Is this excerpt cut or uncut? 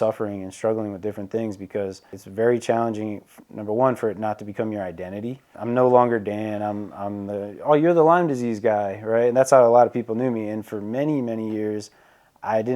cut